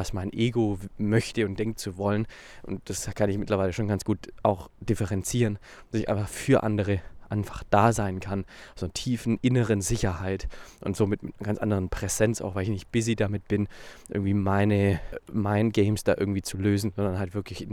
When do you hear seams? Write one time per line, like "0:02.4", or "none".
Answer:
0:15.1

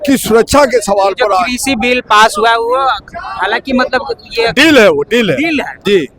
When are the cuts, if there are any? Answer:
none

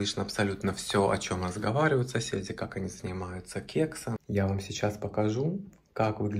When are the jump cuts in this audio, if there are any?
0:04.2

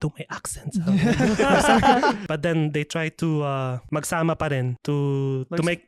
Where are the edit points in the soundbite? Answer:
0:02.2
0:03.8
0:04.8

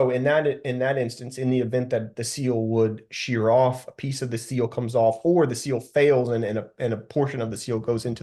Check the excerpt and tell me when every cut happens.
none

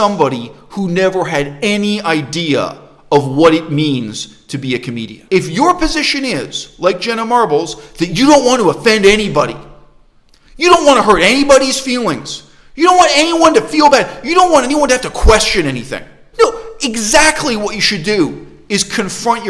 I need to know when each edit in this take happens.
0:05.1
0:16.2

